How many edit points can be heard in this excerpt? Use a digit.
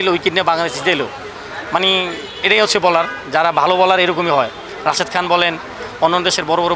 0